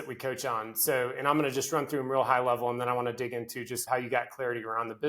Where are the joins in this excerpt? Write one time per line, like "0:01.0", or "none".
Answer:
0:03.8